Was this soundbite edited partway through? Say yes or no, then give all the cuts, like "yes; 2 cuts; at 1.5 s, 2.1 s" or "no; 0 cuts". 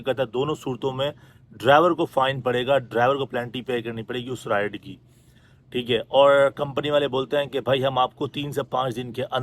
no; 0 cuts